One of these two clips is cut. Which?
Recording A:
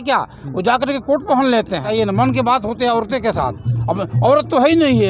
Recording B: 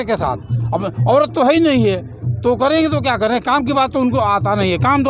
A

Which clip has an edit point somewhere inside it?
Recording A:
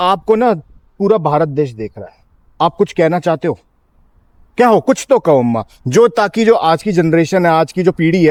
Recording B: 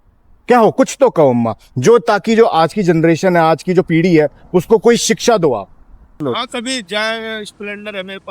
B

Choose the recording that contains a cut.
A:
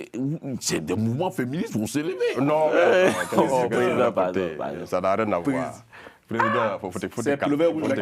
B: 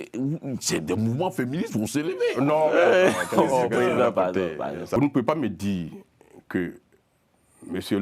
B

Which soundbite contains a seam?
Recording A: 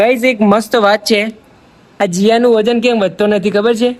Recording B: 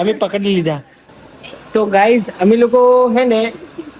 B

